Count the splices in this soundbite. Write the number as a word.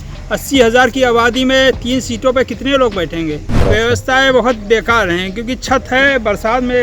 one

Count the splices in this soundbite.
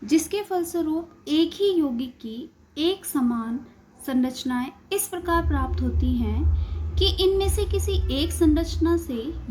one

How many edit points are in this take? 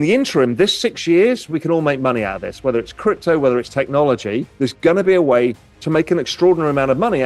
one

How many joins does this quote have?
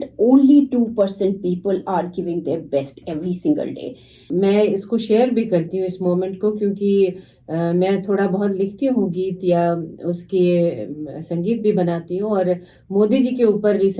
one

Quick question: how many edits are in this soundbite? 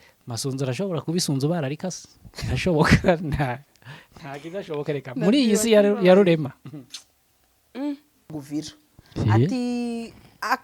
one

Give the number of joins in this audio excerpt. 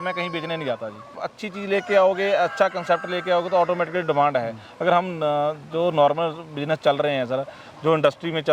one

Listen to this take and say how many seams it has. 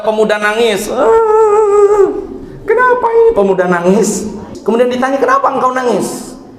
one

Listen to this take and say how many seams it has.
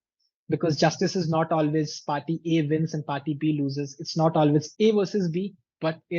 one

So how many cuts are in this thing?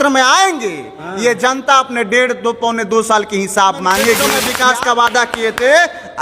one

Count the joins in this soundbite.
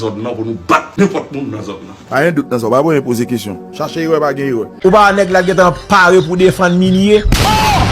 one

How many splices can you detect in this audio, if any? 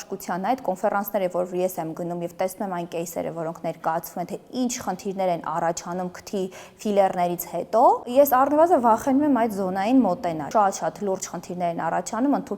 one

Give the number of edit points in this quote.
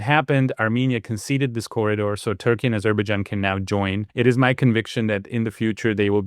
one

